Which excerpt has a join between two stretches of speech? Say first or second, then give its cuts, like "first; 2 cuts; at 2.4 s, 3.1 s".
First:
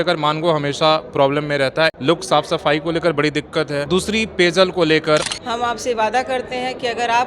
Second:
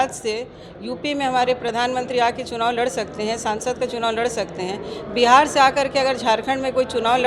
first; 3 cuts; at 2.0 s, 3.8 s, 5.3 s